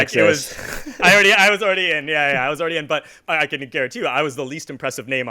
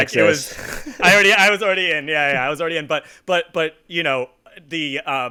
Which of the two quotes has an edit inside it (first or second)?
first